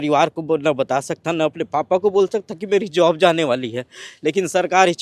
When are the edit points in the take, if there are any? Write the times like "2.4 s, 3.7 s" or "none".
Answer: none